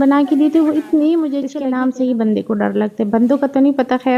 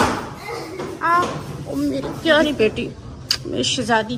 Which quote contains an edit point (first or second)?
first